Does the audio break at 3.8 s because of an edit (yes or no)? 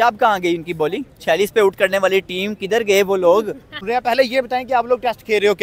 yes